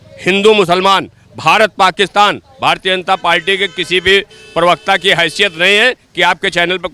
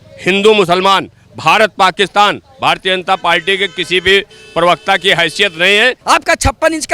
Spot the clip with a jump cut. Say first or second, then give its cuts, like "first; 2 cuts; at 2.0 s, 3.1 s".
second; 1 cut; at 6.0 s